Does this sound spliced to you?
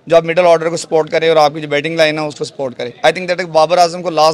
no; 0 cuts

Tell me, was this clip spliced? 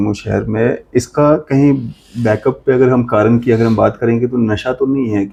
no; 0 cuts

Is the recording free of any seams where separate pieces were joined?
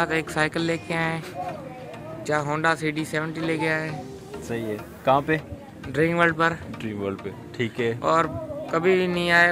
yes; 0 cuts

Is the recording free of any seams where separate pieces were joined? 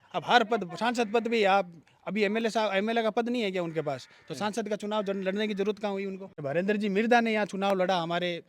no; 1 cut; at 6.3 s

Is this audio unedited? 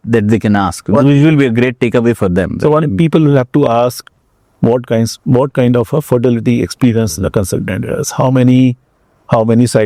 yes; 0 cuts

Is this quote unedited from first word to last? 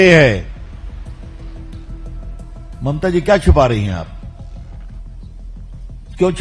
no; 2 cuts; at 1.0 s, 2.8 s

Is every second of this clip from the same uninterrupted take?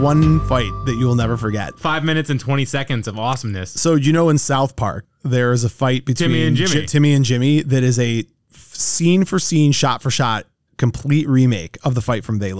yes; 0 cuts

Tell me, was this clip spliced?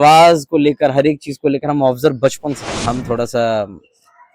yes; 1 cut; at 2.7 s

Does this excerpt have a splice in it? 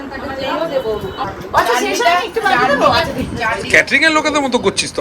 yes; 1 cut; at 1.2 s

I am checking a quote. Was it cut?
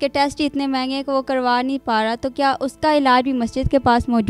no; 0 cuts

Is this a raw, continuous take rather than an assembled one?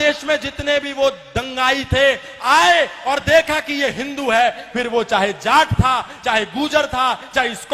yes; 0 cuts

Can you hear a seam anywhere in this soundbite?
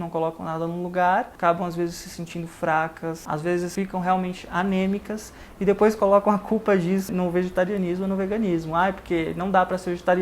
yes; 3 cuts; at 1.3 s, 3.6 s, 7.1 s

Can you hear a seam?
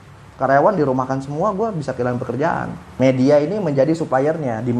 yes; 1 cut; at 2.8 s

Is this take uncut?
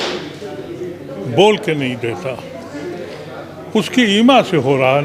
yes; 0 cuts

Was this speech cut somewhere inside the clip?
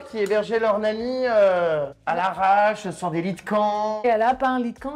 yes; 2 cuts; at 2.0 s, 4.0 s

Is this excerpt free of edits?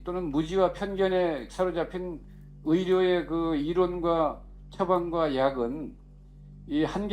yes; 0 cuts

